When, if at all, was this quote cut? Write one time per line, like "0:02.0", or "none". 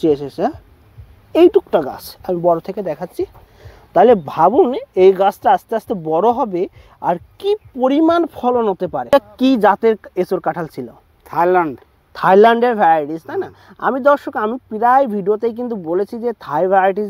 none